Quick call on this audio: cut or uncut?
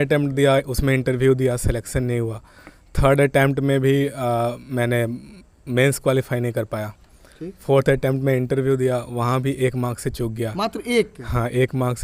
uncut